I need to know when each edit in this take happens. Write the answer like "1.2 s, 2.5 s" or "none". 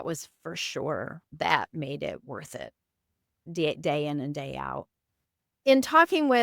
5.4 s